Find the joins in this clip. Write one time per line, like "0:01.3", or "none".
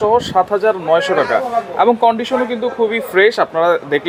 none